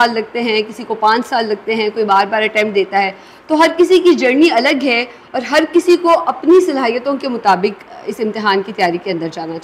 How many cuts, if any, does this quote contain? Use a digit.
0